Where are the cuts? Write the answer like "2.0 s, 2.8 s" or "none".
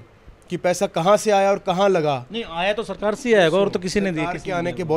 none

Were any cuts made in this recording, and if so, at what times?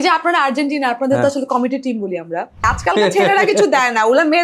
2.7 s

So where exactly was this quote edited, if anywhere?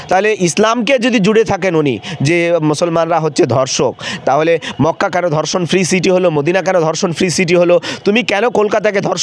none

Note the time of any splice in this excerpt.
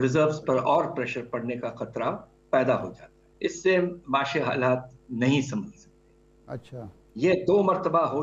3.4 s

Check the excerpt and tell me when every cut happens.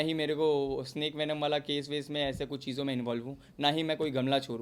none

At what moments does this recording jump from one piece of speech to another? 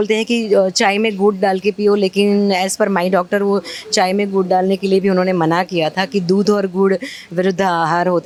none

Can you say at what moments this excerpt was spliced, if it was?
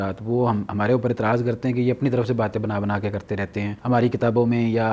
3.8 s

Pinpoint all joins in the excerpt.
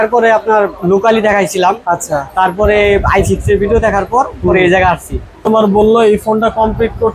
5.4 s

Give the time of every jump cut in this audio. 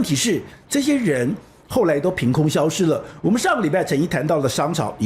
none

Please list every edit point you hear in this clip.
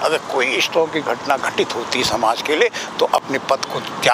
none

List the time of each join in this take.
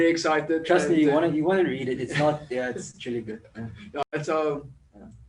4.1 s

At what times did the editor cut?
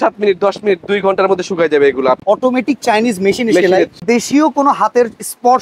2.2 s, 4.0 s

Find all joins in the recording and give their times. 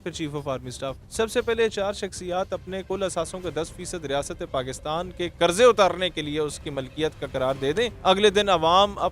1.0 s, 7.9 s

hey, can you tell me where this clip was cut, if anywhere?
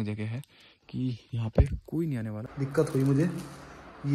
2.5 s

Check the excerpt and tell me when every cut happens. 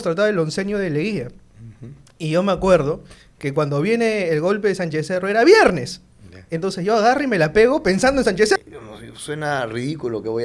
8.6 s

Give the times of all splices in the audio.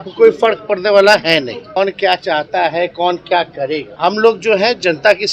1.6 s, 3.9 s

